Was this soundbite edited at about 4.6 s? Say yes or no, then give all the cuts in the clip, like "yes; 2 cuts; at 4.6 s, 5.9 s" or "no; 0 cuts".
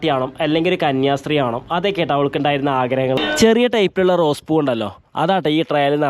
no; 1 cut; at 3.2 s